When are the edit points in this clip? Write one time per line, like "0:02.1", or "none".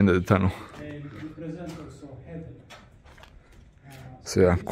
none